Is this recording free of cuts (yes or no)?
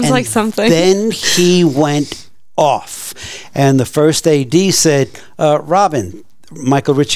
yes